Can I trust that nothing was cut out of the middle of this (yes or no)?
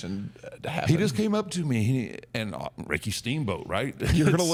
yes